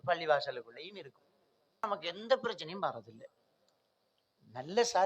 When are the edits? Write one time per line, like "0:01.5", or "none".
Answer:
0:01.9

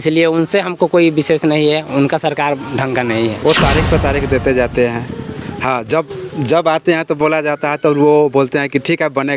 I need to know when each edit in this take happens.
0:03.4

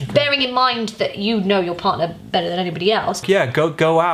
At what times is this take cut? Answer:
0:03.2

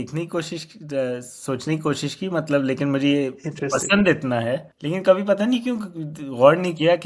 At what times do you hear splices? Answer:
0:04.7

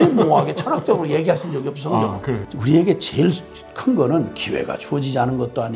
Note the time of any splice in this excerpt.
0:02.5

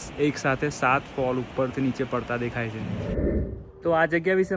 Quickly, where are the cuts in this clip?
0:03.3

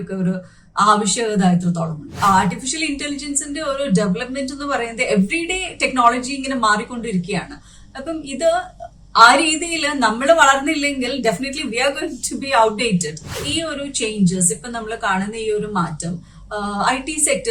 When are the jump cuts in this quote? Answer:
0:02.1
0:13.4

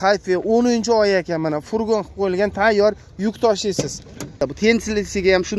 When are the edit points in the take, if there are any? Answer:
0:04.4

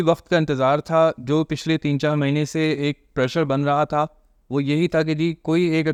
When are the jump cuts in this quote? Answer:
none

